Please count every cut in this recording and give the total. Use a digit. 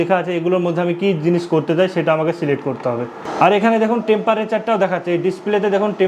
1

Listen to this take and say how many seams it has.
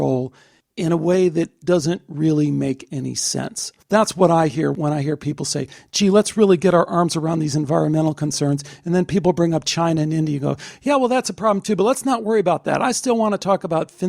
2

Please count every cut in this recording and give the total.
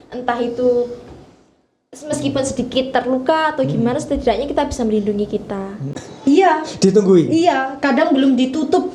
1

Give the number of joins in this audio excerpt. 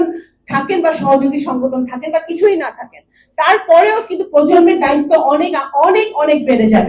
0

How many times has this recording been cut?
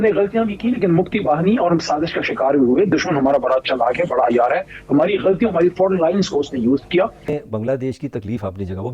1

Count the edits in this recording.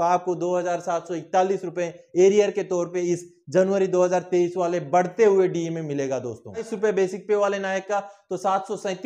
1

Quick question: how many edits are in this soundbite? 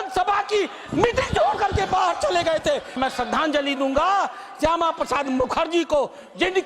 1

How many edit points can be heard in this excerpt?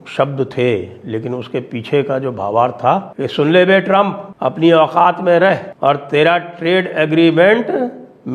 3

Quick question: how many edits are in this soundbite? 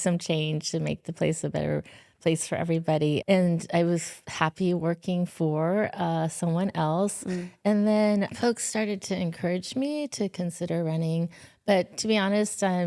2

